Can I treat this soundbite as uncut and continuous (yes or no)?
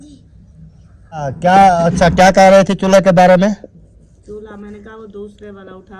no